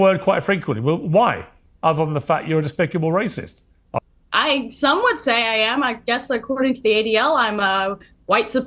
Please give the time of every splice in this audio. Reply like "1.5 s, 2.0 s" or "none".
4.0 s